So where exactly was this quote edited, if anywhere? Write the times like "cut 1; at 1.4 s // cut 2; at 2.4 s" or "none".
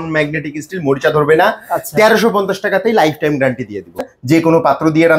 cut 1; at 4.0 s